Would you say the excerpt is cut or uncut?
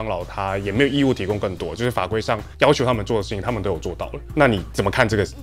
uncut